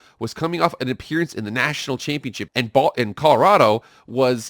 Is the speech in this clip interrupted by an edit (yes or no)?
yes